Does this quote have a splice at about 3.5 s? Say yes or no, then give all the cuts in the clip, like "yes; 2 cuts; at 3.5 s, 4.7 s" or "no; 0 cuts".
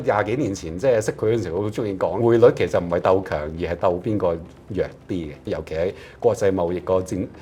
no; 2 cuts; at 2.2 s, 5.5 s